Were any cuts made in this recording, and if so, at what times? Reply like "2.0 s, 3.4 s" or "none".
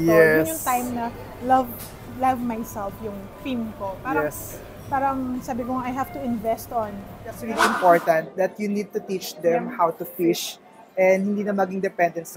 7.5 s